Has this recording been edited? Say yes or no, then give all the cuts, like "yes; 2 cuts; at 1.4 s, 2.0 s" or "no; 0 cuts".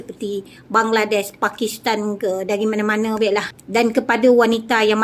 yes; 1 cut; at 3.6 s